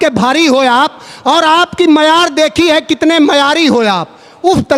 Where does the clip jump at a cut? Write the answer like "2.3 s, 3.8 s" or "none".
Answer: none